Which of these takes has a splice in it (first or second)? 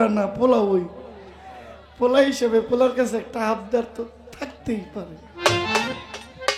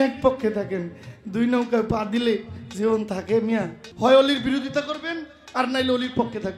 second